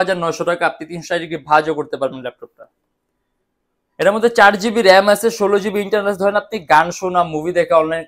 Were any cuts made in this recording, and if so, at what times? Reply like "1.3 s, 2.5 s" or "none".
none